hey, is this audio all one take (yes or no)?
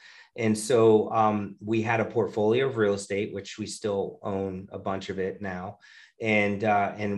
yes